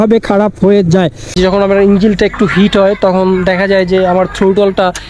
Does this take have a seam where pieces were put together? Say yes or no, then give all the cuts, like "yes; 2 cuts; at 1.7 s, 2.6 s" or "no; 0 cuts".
yes; 1 cut; at 1.3 s